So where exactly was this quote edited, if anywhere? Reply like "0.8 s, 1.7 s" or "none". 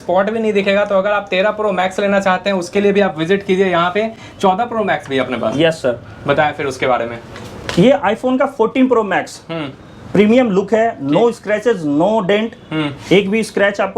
none